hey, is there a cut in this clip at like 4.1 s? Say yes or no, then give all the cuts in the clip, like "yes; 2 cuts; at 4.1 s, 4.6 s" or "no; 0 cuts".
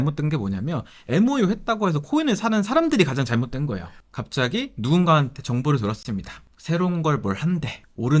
yes; 1 cut; at 4.1 s